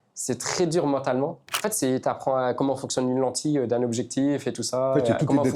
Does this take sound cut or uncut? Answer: cut